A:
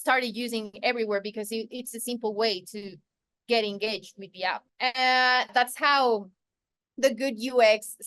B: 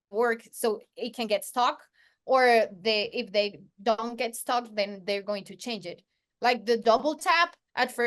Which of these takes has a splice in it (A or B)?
A